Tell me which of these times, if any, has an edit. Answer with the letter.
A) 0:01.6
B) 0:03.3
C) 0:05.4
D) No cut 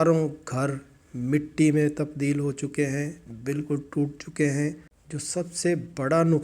D